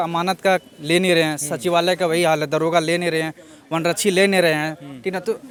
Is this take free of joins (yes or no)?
yes